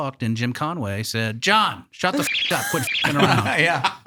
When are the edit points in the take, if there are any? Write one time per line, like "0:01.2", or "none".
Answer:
none